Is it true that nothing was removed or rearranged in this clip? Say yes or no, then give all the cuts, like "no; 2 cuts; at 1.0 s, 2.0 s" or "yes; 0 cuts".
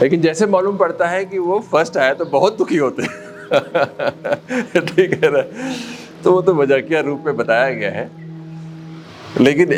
yes; 0 cuts